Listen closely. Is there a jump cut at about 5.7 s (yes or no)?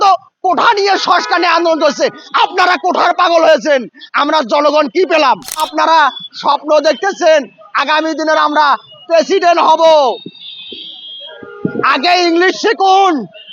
yes